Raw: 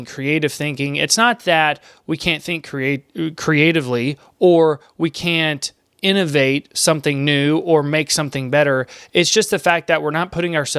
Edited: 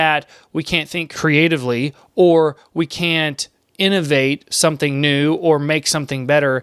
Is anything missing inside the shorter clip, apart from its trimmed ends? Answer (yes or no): yes